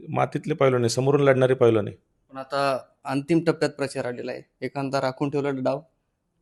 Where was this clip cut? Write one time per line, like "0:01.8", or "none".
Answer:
none

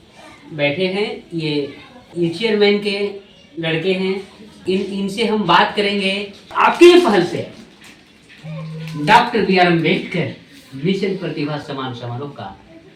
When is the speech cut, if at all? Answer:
0:04.6
0:06.4

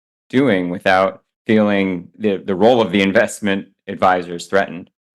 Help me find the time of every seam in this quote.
0:02.1

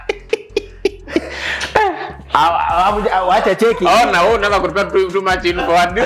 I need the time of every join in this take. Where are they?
none

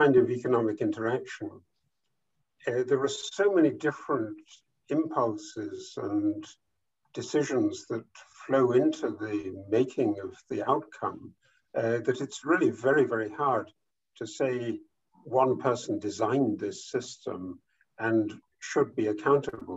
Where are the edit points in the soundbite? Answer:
none

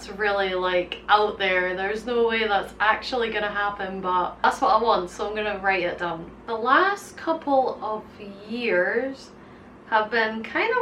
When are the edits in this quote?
none

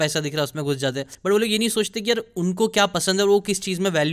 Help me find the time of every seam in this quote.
0:01.1

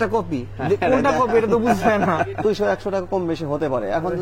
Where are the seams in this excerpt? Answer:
0:02.4

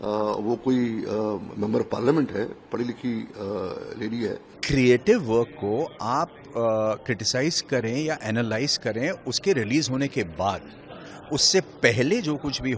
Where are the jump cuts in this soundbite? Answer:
0:04.5

